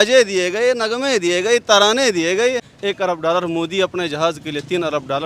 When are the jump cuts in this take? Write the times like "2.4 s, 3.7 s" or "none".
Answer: 2.7 s

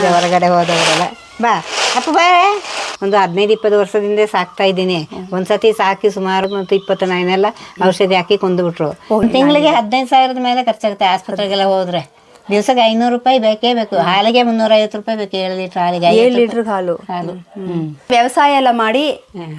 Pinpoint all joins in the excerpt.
2.9 s, 6.5 s, 8.9 s, 18.0 s

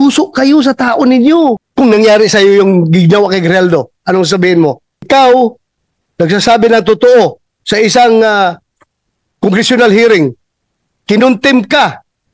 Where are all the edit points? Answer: 1.7 s, 5.0 s

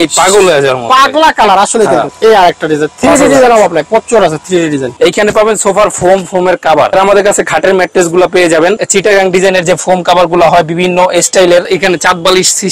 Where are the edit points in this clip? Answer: 2.1 s, 4.9 s, 6.9 s, 8.8 s, 11.7 s

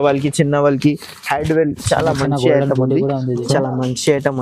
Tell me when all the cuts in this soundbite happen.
3.4 s

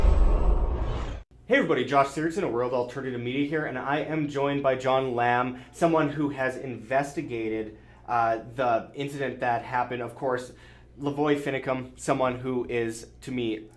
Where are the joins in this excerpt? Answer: 1.2 s

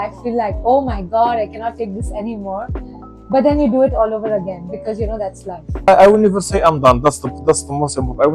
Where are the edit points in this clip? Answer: 5.9 s

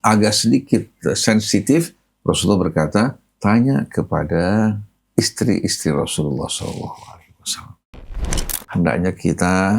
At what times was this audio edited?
4.9 s, 8.2 s

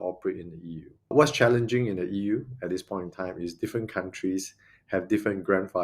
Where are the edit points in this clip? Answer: 1.1 s

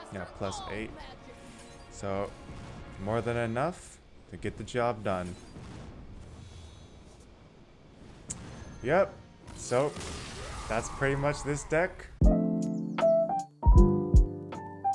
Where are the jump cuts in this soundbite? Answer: 12.1 s

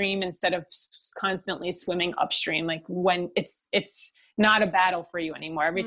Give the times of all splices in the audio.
none

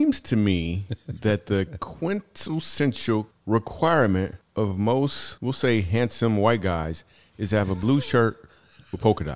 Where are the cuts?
3.3 s, 4.4 s, 5.3 s

